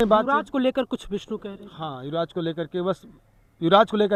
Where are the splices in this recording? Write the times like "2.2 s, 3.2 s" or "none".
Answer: none